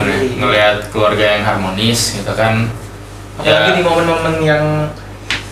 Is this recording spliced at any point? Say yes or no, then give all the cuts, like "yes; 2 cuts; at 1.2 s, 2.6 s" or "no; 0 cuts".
no; 0 cuts